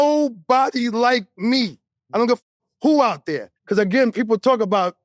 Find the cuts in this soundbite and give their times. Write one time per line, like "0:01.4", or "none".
0:03.5